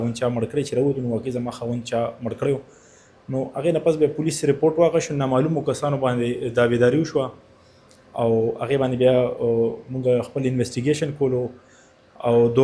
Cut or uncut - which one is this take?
uncut